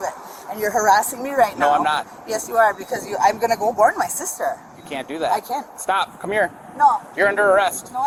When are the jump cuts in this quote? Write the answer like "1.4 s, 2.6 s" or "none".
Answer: none